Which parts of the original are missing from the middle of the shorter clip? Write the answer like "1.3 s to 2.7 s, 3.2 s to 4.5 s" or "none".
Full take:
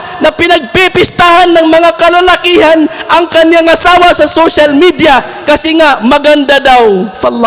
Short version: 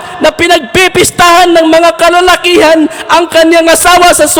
none